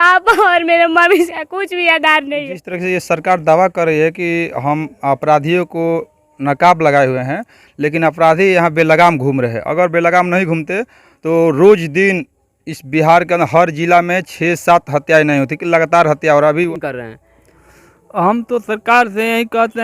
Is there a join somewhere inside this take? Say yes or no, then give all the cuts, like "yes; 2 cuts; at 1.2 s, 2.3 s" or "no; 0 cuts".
yes; 2 cuts; at 2.6 s, 16.7 s